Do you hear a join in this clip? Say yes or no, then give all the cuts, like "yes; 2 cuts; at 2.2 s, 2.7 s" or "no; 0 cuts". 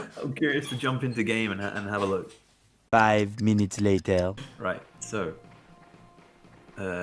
yes; 1 cut; at 4.5 s